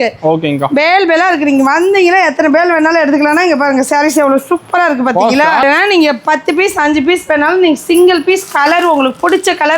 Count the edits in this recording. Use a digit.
1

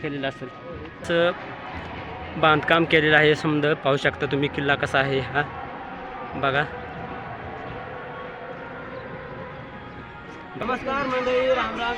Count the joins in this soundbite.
2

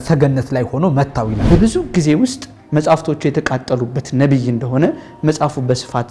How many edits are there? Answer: 1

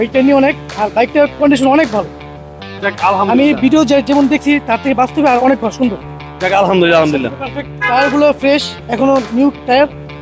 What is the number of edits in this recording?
0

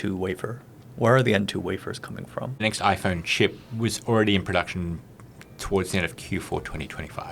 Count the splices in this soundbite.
1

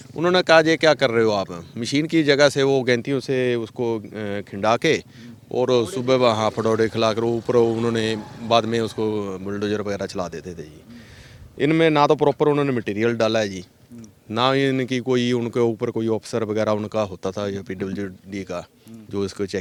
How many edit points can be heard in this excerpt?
0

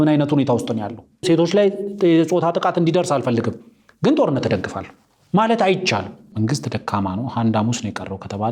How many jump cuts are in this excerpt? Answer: 2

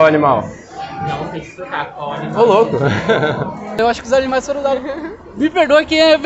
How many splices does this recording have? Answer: 1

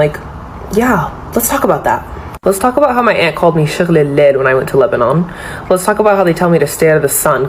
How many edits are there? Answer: 0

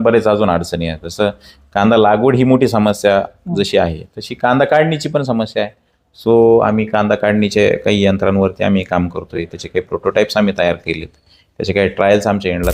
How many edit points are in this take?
0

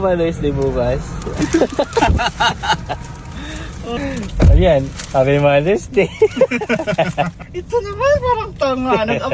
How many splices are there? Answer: 2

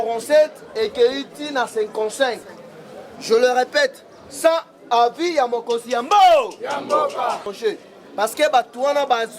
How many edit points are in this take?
1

